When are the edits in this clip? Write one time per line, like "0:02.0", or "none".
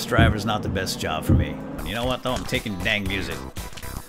0:01.8